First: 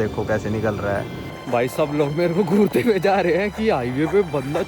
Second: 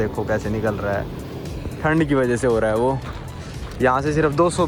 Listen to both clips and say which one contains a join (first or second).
first